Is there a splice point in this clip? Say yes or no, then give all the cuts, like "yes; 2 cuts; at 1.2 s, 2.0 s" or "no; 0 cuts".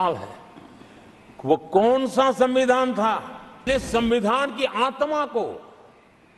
yes; 1 cut; at 3.7 s